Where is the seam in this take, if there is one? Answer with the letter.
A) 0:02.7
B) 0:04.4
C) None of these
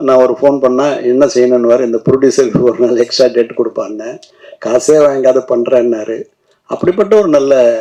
C